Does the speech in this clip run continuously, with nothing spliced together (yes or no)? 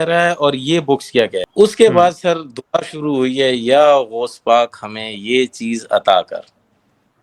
no